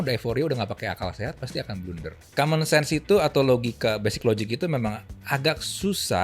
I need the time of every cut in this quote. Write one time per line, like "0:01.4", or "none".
0:02.2